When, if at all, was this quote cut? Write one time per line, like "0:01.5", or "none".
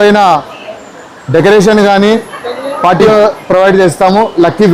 0:03.1